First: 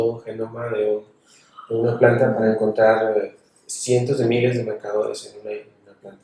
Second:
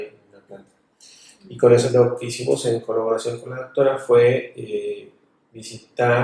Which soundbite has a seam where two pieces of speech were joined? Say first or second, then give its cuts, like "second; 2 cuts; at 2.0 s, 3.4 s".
second; 1 cut; at 1.9 s